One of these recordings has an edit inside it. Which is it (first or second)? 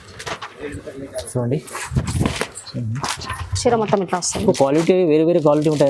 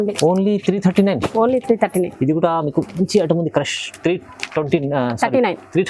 first